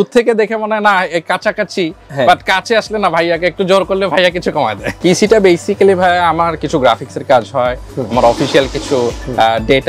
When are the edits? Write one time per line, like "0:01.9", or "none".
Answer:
0:04.9